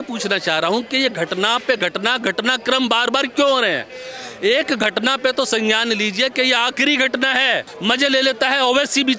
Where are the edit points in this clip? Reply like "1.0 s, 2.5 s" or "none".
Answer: 7.7 s